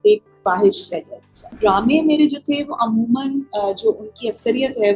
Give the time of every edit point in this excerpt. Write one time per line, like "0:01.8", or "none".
0:01.5